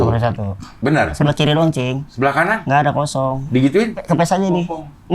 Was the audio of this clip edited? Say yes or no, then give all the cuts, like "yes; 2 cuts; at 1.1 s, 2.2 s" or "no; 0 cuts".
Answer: yes; 3 cuts; at 1.2 s, 2.4 s, 4.0 s